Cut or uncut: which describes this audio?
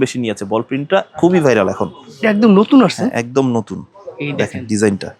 uncut